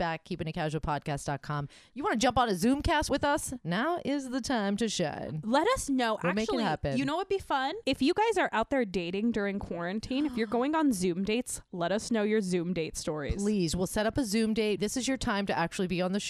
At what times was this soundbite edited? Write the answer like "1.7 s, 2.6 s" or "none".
1.8 s, 7.8 s